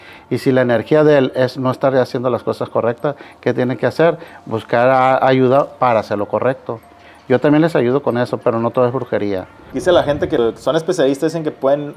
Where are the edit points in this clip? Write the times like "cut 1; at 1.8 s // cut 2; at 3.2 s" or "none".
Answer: cut 1; at 9.6 s // cut 2; at 10.4 s